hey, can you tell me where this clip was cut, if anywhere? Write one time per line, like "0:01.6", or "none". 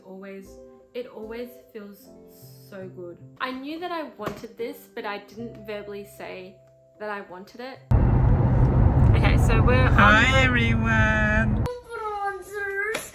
0:03.2
0:07.9